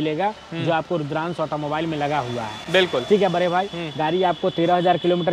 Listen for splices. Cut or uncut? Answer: uncut